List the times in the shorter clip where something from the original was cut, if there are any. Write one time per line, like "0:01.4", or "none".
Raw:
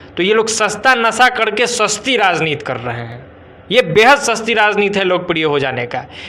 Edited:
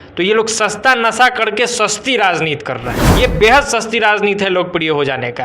0:03.0